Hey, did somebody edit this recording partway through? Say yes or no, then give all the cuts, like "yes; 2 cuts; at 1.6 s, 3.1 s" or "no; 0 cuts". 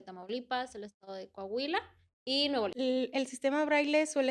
yes; 1 cut; at 2.7 s